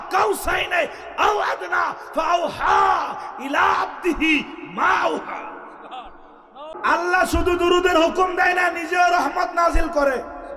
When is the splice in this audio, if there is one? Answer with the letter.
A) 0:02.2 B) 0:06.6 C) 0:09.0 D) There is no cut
B